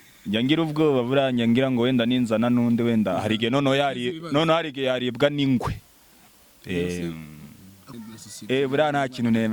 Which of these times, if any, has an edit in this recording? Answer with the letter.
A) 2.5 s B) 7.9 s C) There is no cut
B